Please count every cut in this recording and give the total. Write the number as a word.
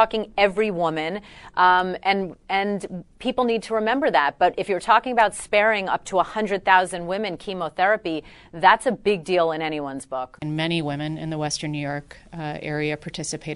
one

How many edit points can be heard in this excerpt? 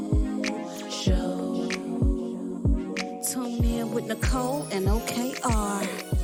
zero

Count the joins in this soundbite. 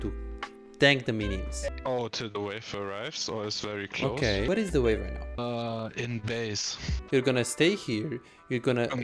four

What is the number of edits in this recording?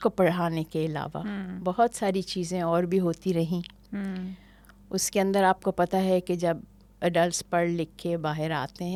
zero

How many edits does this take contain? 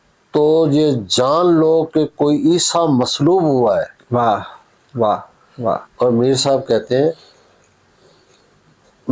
zero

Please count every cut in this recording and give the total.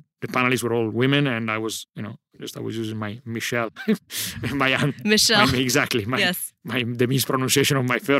zero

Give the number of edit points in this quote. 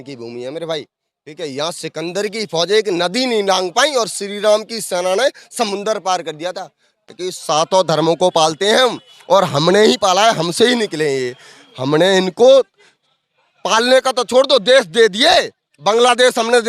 one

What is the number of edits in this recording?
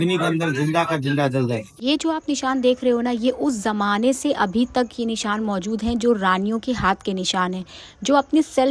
one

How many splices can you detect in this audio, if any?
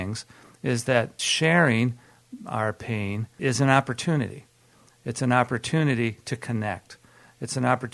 two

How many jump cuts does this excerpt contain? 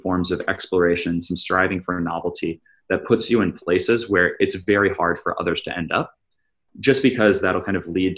zero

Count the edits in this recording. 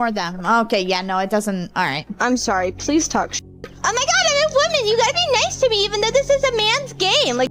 zero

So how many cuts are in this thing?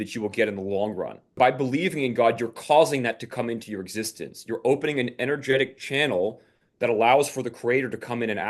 one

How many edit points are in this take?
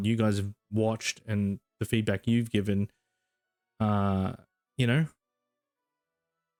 zero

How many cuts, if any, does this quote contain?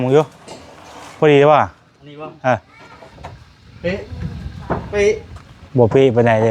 zero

